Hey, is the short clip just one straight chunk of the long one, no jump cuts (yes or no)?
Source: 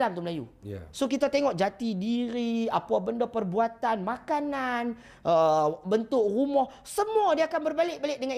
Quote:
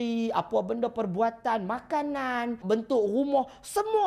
no